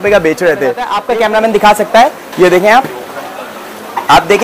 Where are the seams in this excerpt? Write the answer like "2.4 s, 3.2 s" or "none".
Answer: 0.9 s